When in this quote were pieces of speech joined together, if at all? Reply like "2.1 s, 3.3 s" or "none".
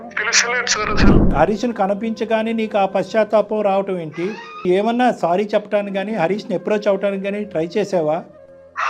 1.3 s, 4.6 s